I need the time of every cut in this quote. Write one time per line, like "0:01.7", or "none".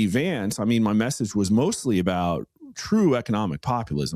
none